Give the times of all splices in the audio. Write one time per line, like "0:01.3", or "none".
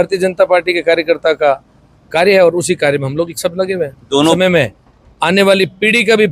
0:04.4